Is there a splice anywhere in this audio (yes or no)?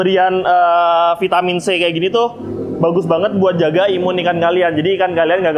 no